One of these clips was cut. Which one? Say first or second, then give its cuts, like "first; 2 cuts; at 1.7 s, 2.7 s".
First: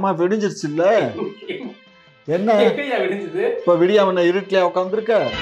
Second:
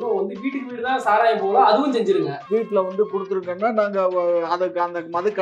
second; 1 cut; at 2.4 s